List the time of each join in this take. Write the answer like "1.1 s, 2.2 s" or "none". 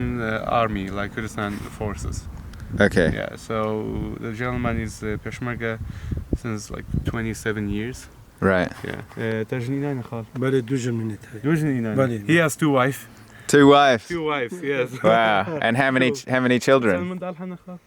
none

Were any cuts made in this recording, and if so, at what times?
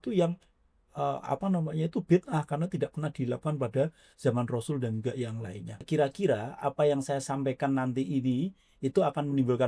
5.8 s

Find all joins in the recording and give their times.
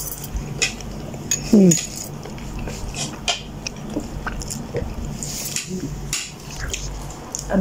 none

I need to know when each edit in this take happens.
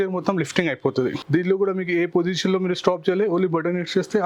none

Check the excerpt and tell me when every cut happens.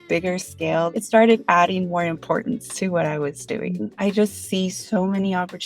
1.0 s, 3.9 s

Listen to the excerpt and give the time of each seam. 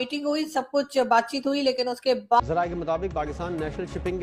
none

